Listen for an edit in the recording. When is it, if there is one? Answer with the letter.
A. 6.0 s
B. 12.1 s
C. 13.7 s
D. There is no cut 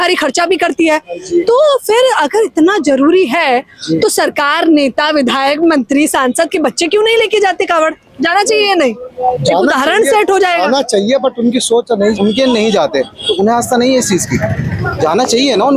B